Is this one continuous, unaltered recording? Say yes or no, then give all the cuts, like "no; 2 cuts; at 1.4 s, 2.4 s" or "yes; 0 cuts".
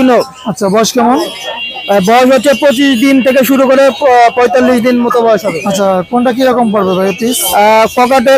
yes; 0 cuts